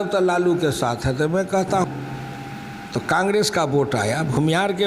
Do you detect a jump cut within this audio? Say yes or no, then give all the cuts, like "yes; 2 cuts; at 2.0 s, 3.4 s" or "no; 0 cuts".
yes; 1 cut; at 1.8 s